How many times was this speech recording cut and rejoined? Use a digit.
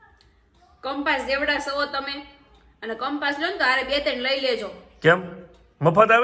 0